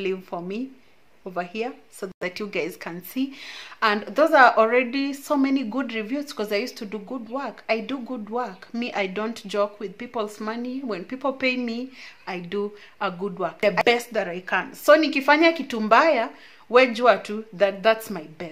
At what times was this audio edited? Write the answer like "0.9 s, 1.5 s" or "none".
none